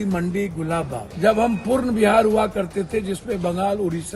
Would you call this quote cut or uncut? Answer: cut